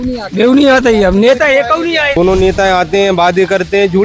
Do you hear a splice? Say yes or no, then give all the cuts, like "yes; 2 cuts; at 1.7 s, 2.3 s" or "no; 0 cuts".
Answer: yes; 1 cut; at 2.2 s